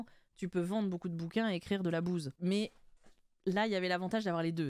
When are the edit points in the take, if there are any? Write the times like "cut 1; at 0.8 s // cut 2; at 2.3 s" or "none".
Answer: cut 1; at 2.3 s